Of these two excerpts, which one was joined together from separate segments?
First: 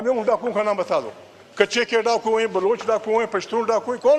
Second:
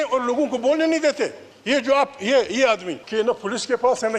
second; 2 cuts; at 1.5 s, 3.0 s

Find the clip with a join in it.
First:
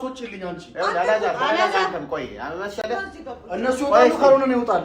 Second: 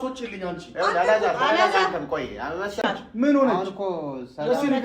second; 1 cut; at 2.8 s

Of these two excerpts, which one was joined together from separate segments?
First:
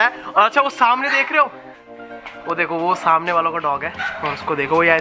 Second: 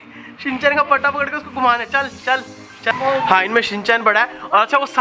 second; 1 cut; at 2.9 s

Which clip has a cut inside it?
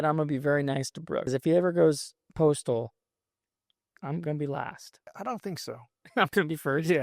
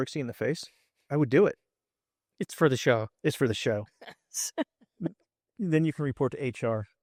first; 2 cuts; at 1.3 s, 5.1 s

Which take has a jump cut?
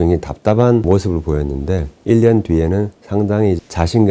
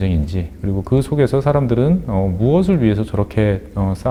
first; 3 cuts; at 0.8 s, 1.9 s, 3.0 s

